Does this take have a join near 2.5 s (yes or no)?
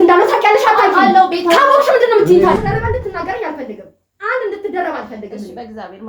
yes